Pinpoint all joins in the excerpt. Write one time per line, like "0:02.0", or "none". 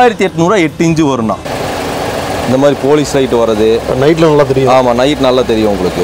0:01.5